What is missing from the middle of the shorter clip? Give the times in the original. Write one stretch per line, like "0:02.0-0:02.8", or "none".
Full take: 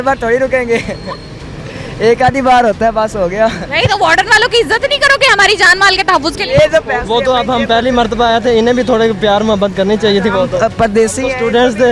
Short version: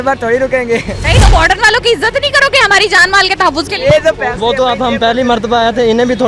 0:01.0-0:03.7